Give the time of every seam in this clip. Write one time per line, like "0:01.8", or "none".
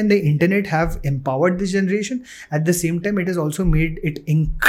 none